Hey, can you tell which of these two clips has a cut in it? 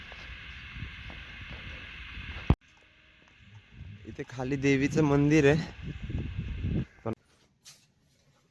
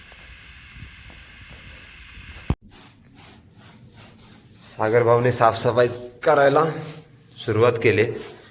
second; 1 cut; at 2.6 s

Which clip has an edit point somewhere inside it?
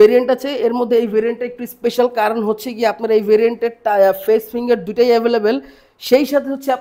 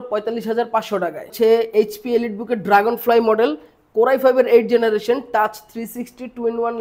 second; 1 cut; at 1.3 s

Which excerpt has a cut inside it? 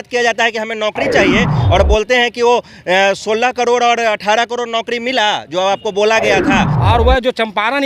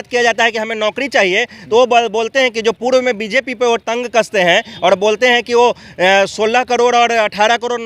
first; 2 cuts; at 1.6 s, 6.7 s

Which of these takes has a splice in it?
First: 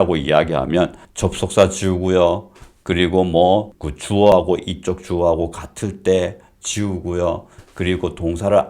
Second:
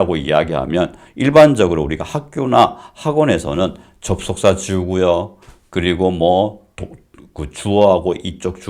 first; 2 cuts; at 1.0 s, 4.3 s

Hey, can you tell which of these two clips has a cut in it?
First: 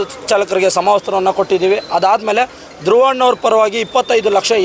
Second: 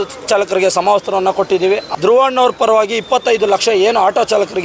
second; 1 cut; at 1.9 s

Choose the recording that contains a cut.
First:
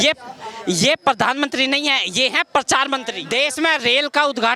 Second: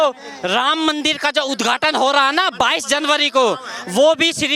first; 1 cut; at 3.2 s

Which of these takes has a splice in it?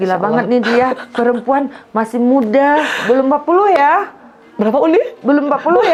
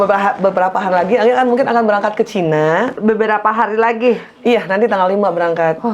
second; 1 cut; at 3.0 s

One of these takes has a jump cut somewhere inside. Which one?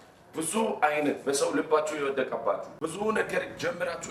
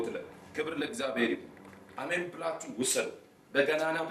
first; 1 cut; at 2.8 s

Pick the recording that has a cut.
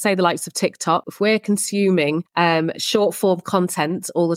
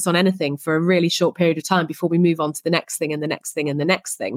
first; 2 cuts; at 1.1 s, 2.3 s

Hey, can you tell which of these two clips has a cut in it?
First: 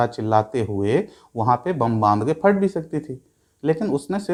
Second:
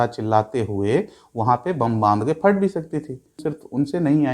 second; 1 cut; at 3.4 s

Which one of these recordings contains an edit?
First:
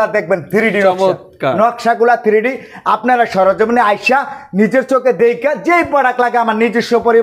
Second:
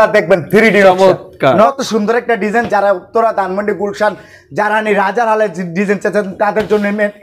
second; 1 cut; at 1.8 s

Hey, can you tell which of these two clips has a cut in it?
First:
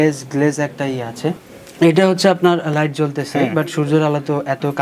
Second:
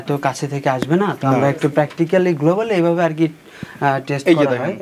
first; 1 cut; at 1.4 s

